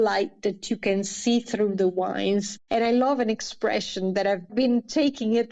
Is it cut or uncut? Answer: cut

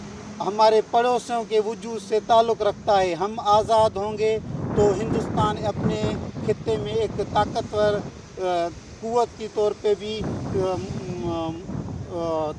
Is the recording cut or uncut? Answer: uncut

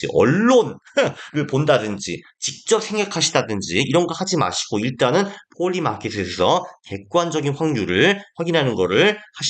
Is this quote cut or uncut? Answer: uncut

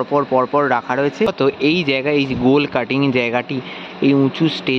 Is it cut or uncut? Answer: cut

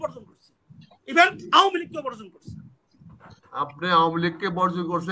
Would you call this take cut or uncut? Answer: uncut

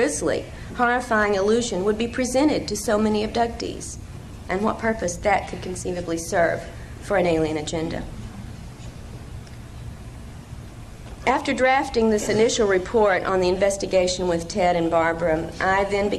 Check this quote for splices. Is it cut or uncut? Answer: cut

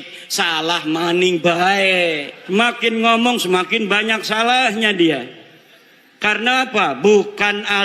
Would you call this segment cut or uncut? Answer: cut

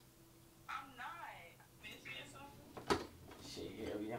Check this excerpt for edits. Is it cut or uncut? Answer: cut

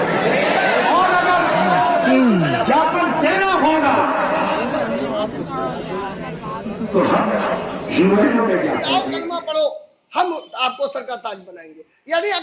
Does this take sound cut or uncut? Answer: cut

